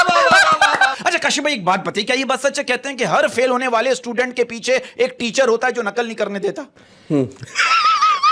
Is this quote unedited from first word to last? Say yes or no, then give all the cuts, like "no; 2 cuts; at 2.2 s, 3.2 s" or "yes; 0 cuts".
no; 1 cut; at 1.0 s